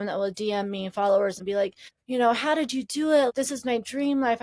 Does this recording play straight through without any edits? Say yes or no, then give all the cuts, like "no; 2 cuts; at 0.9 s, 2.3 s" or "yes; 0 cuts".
no; 2 cuts; at 1.5 s, 3.3 s